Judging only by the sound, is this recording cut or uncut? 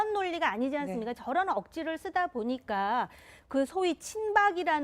cut